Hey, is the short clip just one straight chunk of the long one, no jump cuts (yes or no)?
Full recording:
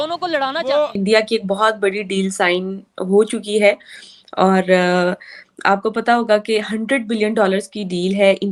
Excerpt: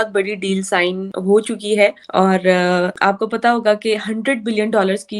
no